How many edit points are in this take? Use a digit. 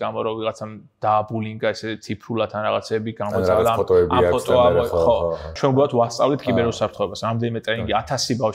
1